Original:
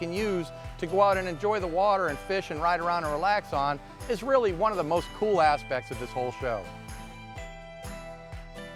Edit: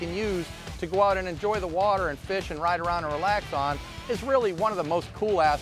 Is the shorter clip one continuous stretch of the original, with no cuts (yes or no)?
yes